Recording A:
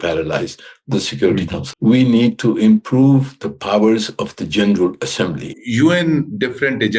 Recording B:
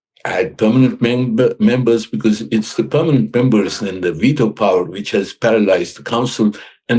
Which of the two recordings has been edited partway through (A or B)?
A